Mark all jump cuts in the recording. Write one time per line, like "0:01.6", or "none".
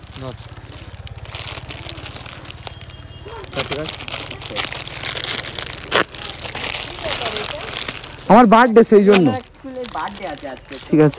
none

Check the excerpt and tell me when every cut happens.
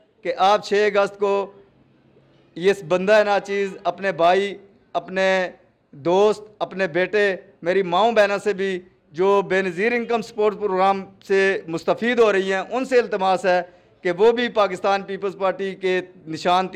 none

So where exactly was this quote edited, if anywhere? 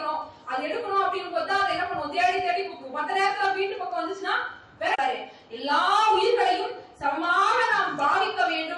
0:05.0

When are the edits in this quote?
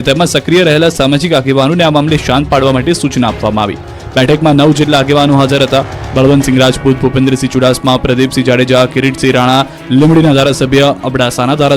none

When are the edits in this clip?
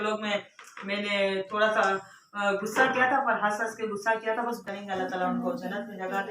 0:04.7

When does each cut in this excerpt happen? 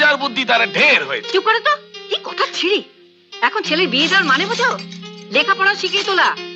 none

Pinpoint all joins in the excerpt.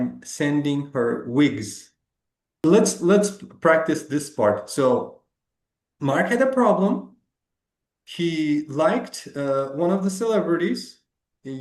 none

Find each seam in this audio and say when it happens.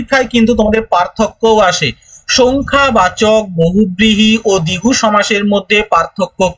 none

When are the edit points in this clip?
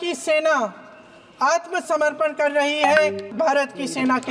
0:01.8
0:03.2

